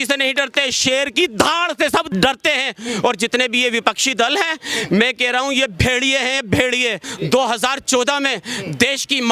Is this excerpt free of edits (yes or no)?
no